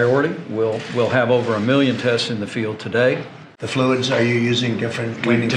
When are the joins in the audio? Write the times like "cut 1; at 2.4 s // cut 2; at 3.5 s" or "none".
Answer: cut 1; at 3.5 s